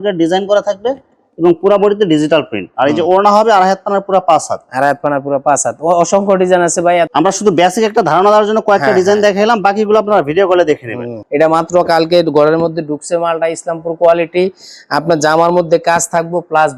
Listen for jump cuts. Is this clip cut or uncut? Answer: uncut